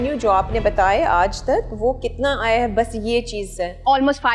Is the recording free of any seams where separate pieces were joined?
yes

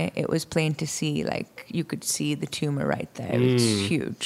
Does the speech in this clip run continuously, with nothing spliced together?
yes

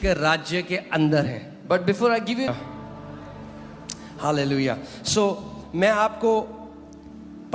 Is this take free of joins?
no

